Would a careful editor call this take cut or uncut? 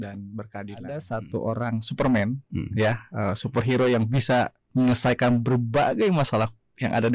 cut